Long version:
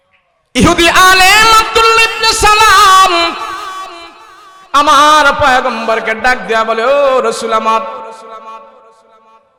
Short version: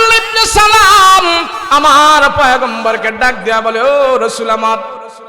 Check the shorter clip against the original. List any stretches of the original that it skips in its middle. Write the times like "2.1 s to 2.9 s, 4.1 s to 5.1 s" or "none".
3.4 s to 4.6 s